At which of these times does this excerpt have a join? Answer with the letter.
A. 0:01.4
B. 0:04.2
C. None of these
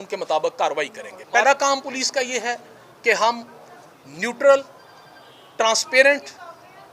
A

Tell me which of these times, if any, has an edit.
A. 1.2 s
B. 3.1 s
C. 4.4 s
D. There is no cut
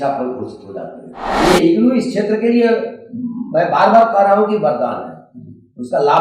A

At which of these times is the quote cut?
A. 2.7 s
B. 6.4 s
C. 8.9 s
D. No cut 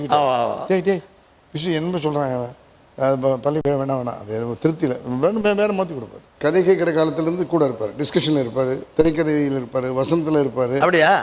B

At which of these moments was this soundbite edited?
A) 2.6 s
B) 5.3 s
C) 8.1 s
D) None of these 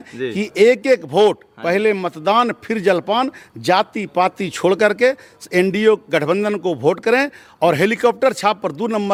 D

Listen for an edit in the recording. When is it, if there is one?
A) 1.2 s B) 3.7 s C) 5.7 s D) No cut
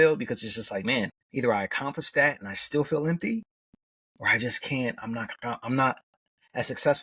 A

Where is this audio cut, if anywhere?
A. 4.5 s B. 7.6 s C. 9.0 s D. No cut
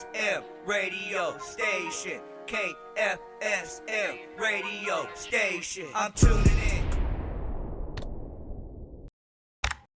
C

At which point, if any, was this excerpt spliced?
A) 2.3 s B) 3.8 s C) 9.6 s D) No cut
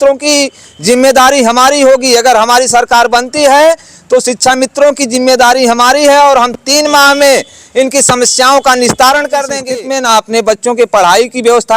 C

